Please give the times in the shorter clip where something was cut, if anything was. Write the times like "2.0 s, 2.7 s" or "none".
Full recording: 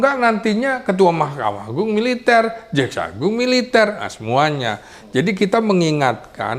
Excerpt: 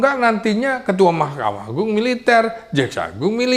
none